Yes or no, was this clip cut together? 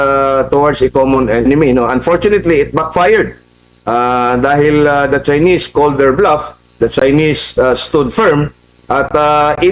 no